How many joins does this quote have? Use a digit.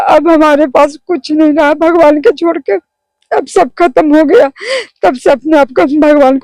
0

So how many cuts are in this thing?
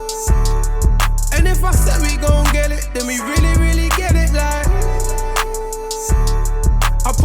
1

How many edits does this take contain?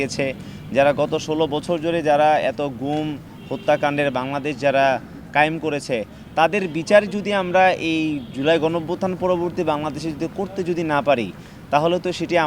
0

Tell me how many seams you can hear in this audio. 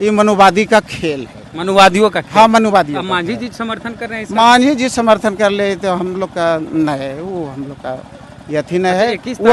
0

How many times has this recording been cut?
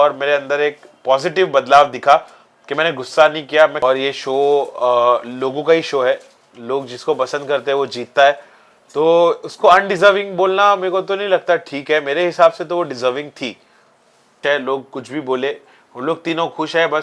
2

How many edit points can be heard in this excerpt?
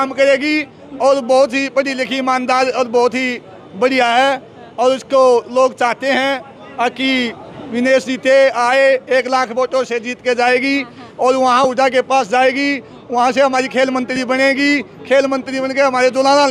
0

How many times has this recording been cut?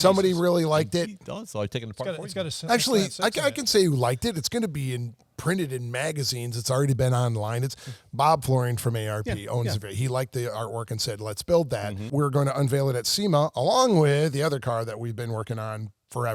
1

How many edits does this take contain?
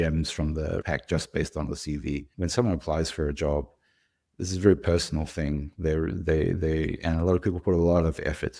2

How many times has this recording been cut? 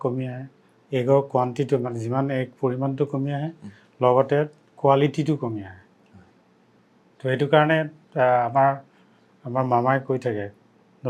0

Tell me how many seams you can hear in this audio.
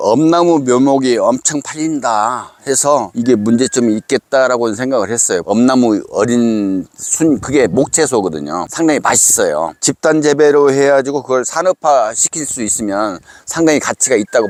0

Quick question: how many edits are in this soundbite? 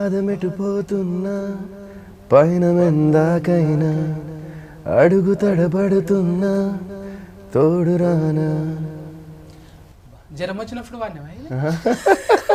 0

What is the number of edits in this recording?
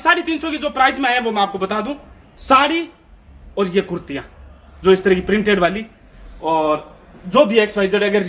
0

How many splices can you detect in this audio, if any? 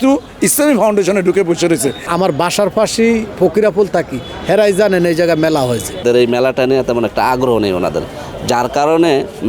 2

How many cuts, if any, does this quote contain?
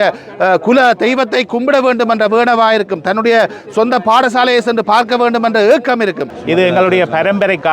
1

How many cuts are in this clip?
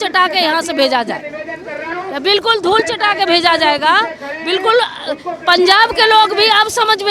0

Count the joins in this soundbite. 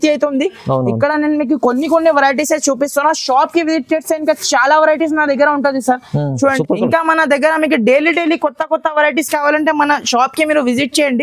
1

